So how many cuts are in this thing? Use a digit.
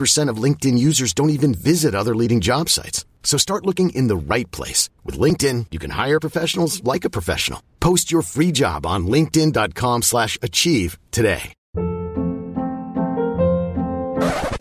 1